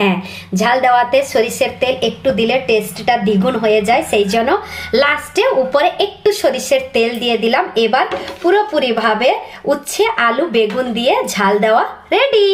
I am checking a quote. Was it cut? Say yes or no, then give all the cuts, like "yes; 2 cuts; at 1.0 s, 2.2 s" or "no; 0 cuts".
no; 0 cuts